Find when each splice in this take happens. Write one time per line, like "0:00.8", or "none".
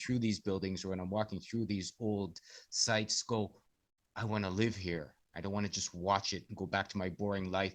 none

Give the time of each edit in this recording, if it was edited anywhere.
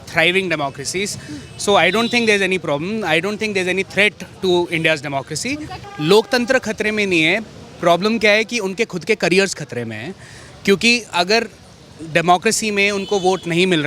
0:05.8

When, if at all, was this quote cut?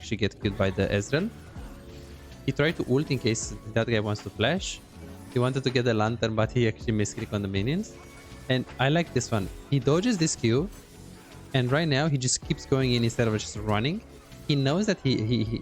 none

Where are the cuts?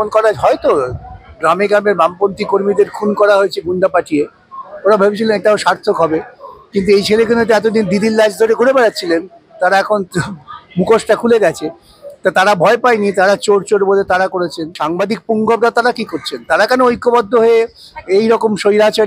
0:14.8

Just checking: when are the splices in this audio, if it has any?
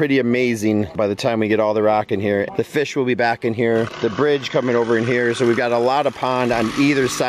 0:00.9
0:02.5

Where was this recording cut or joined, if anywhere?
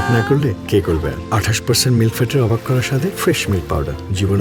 none

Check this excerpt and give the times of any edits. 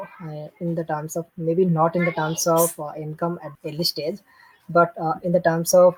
none

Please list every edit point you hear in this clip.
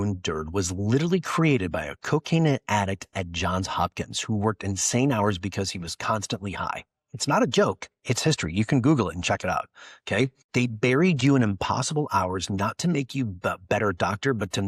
0:10.4

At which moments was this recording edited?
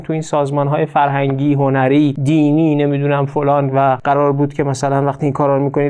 0:02.2
0:04.0

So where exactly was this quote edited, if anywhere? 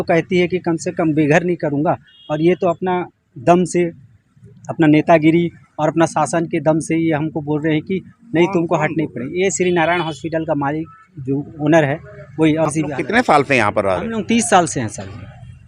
0:12.7

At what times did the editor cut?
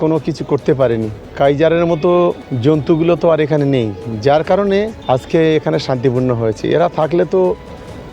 0:01.2
0:02.5
0:05.0

